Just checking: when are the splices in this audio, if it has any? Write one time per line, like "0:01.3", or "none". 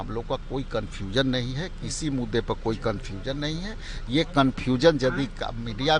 none